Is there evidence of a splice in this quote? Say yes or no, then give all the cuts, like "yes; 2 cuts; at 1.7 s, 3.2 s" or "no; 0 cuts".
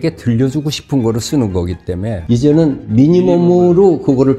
yes; 1 cut; at 2.2 s